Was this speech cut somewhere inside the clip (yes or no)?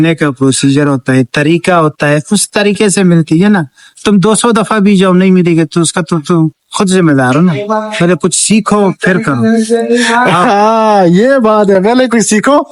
no